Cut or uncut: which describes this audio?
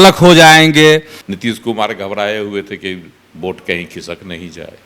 cut